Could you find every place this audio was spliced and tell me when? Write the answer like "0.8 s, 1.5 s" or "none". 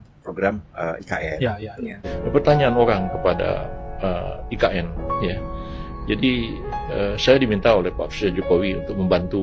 2.1 s

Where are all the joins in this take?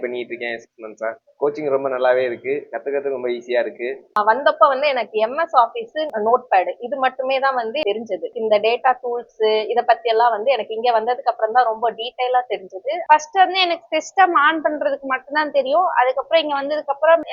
4.1 s, 8.3 s, 13.0 s

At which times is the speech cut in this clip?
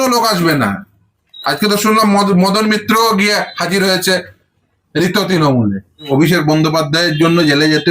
6.1 s

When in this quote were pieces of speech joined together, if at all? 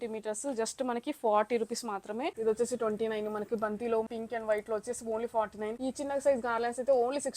2.4 s, 4.1 s, 5.8 s

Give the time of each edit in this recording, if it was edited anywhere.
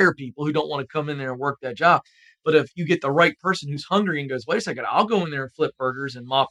none

